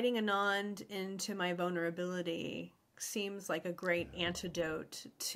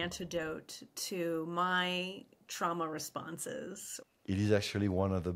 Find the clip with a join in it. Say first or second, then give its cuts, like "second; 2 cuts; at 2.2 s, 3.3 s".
second; 1 cut; at 3.9 s